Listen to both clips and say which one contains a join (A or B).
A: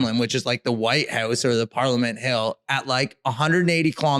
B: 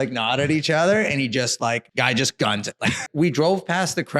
B